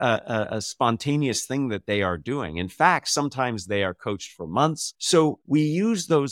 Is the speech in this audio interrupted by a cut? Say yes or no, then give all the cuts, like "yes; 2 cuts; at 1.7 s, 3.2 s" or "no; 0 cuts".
yes; 1 cut; at 4.9 s